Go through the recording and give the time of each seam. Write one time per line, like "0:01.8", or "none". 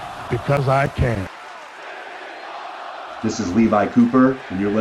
0:01.3
0:03.2